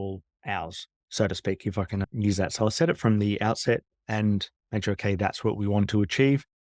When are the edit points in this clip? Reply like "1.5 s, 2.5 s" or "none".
3.9 s